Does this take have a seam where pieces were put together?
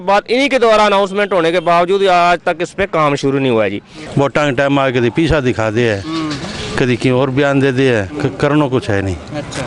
yes; 1 cut; at 4.0 s

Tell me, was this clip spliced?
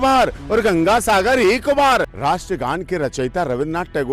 yes; 1 cut; at 2.1 s

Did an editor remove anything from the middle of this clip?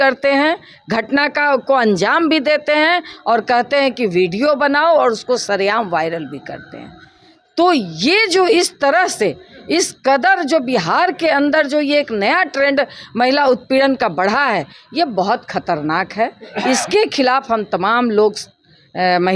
no; 0 cuts

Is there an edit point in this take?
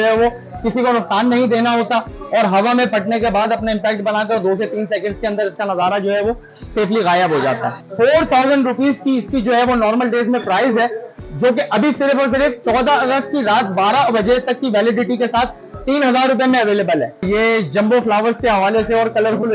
yes; 2 cuts; at 7.8 s, 17.2 s

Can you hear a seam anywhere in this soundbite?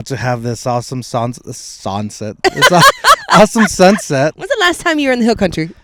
no; 0 cuts

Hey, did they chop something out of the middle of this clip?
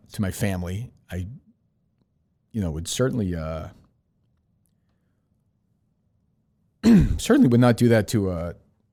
no; 0 cuts

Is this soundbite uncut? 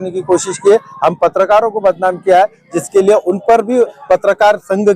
yes; 0 cuts

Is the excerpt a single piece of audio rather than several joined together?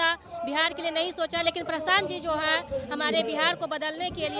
yes; 0 cuts

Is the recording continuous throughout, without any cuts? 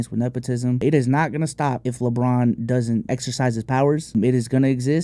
no; 4 cuts; at 0.8 s, 1.9 s, 3.0 s, 4.1 s

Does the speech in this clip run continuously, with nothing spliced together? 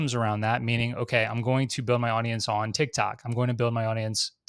yes; 0 cuts

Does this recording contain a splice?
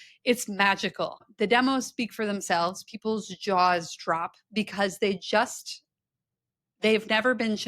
yes; 1 cut; at 1.3 s

